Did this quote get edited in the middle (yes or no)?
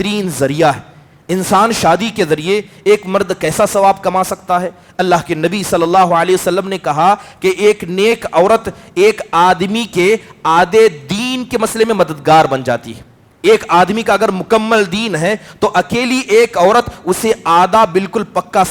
no